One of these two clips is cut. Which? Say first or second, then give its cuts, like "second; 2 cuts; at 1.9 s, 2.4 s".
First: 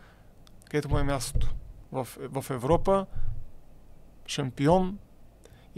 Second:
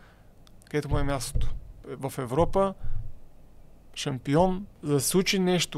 second; 2 cuts; at 1.8 s, 4.7 s